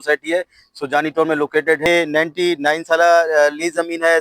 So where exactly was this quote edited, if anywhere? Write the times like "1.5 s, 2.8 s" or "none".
1.8 s